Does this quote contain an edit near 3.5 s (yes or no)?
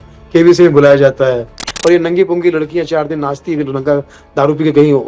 no